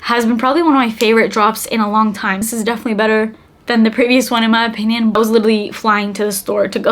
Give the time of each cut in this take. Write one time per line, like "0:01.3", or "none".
0:02.5
0:05.1